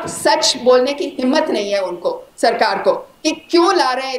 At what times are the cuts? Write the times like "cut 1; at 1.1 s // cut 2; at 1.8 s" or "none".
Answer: none